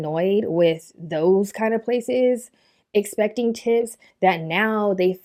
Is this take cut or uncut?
uncut